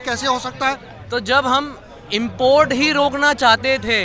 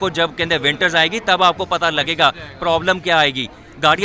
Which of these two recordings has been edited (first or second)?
first